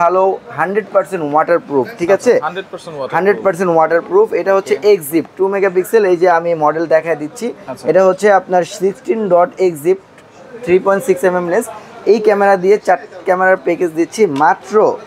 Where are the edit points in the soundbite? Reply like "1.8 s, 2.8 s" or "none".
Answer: none

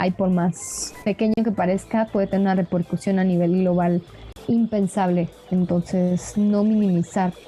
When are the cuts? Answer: none

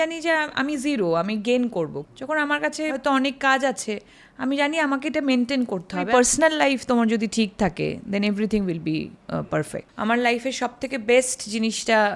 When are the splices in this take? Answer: 2.1 s, 3.0 s, 6.1 s, 9.5 s

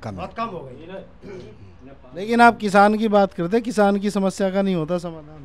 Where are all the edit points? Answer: none

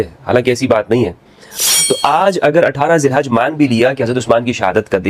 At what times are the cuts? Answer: 1.6 s

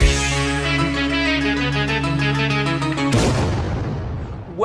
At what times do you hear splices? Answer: none

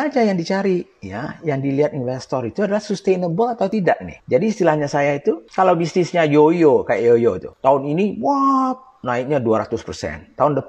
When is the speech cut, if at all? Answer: 3.8 s, 5.5 s, 7.5 s

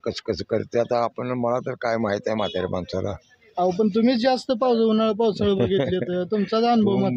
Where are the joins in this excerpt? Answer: none

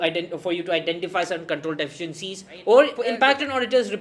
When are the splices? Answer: 2.9 s

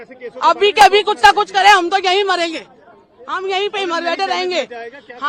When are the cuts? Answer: none

